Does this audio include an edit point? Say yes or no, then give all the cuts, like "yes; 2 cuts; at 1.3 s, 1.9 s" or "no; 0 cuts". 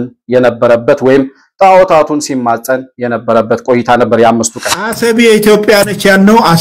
yes; 1 cut; at 4.9 s